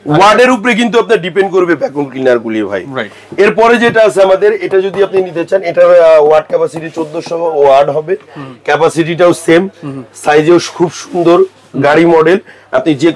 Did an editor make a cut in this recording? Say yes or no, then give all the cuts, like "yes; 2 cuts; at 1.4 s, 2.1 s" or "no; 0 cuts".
no; 0 cuts